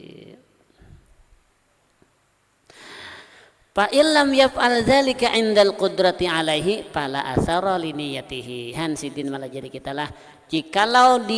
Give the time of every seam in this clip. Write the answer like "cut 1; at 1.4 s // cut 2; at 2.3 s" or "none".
cut 1; at 1.1 s